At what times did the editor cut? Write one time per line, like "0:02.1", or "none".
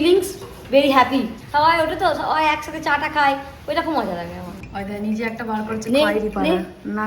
0:01.4
0:04.7